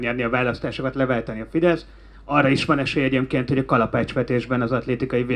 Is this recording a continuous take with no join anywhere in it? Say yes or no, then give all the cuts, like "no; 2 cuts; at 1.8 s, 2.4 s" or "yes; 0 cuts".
yes; 0 cuts